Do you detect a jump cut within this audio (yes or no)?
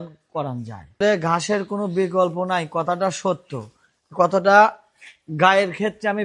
yes